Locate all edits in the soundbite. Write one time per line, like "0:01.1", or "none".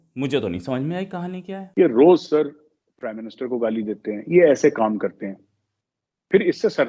0:01.6